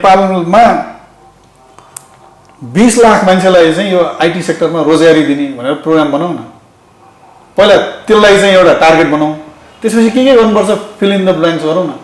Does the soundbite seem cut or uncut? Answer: uncut